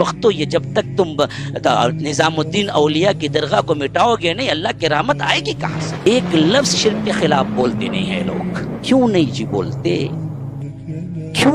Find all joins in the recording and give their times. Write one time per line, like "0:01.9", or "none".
0:05.9